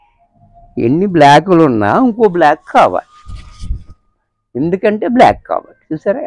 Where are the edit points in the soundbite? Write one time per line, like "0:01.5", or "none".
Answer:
none